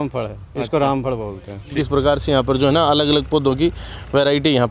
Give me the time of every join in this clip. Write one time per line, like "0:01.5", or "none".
0:01.7

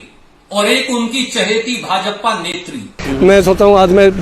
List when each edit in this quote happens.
0:03.0

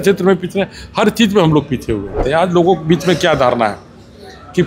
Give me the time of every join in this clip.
0:02.2

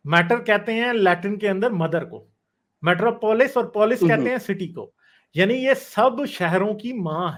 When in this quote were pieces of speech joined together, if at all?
none

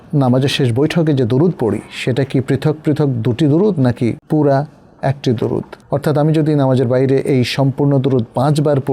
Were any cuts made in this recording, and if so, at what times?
0:04.2
0:05.8

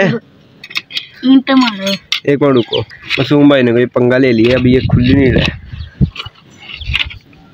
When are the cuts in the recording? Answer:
none

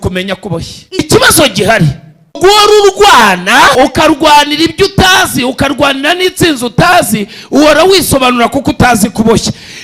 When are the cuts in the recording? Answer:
0:01.0
0:02.4
0:03.7

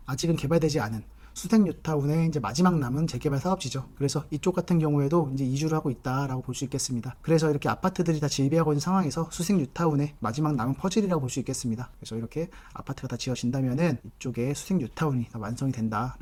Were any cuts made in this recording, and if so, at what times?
none

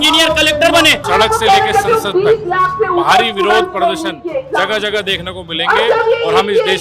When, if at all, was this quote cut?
0:01.1

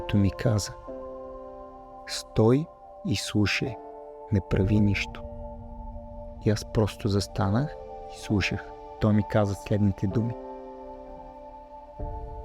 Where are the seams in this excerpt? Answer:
0:09.0

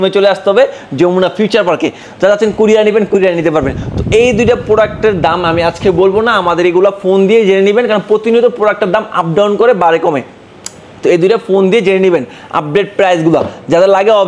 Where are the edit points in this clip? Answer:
none

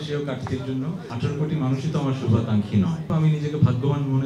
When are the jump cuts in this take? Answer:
0:01.1
0:03.0

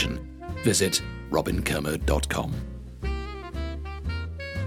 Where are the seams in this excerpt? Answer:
0:02.6

